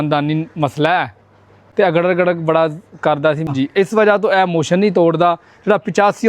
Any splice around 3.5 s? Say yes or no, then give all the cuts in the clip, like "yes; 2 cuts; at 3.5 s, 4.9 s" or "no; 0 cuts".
yes; 1 cut; at 3.5 s